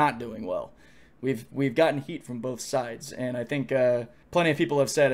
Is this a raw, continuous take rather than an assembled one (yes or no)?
no